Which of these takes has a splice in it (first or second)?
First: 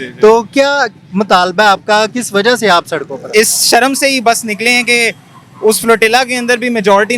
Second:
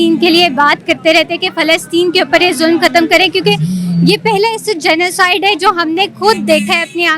first